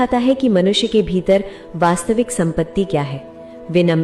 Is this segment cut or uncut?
cut